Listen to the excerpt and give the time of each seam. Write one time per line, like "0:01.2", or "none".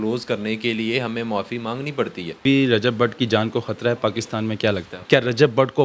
0:02.4
0:04.9